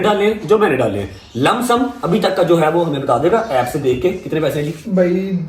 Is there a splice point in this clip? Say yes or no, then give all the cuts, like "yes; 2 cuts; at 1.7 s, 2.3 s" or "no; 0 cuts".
no; 0 cuts